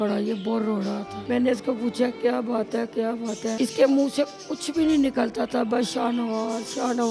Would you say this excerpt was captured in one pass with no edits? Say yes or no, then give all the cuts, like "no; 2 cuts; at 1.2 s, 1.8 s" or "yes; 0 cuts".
no; 2 cuts; at 1.1 s, 3.6 s